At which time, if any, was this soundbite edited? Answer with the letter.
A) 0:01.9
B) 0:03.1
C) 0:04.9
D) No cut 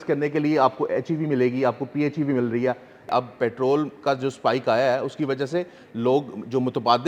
B